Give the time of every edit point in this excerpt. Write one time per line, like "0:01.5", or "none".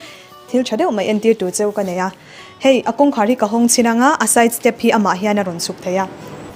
none